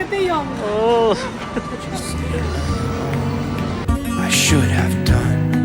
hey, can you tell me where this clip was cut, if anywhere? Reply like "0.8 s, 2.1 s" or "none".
none

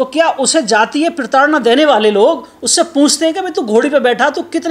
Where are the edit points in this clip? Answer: none

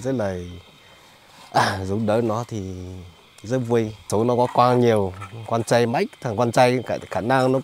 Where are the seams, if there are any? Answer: 4.1 s

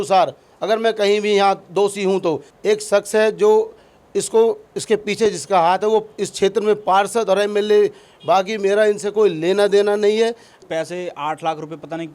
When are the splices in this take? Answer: 2.5 s, 8.1 s, 10.5 s

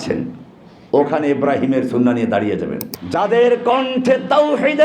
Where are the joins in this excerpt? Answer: 2.8 s

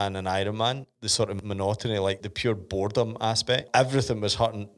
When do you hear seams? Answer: 1.1 s, 2.2 s, 3.6 s

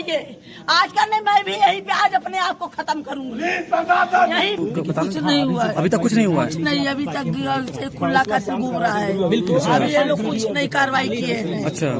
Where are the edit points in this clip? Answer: 4.5 s

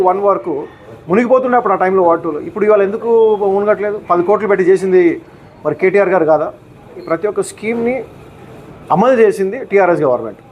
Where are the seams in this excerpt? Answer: 7.0 s

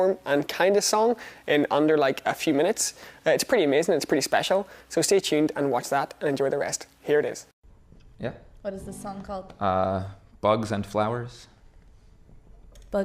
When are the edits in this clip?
9.3 s

